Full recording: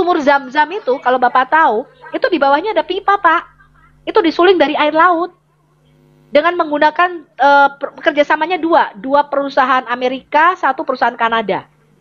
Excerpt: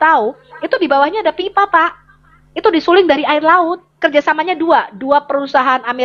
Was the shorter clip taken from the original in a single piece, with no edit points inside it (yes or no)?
no